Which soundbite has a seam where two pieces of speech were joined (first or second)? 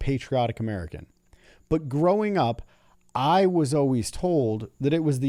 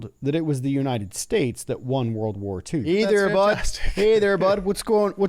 second